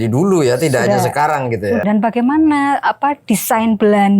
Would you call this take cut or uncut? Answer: cut